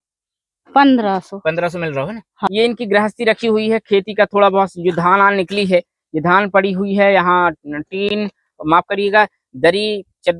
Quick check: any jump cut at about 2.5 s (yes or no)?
yes